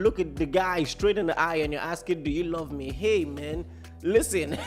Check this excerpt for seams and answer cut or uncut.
uncut